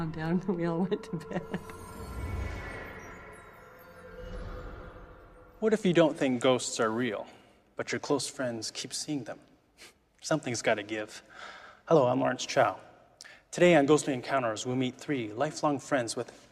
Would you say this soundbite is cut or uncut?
cut